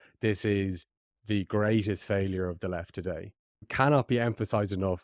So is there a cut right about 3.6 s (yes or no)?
yes